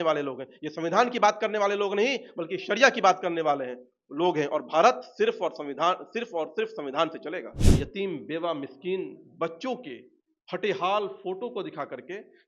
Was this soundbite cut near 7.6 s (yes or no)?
yes